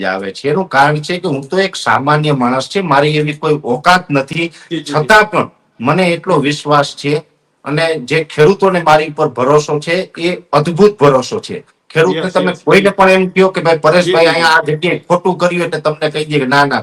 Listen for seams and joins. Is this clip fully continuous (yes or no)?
yes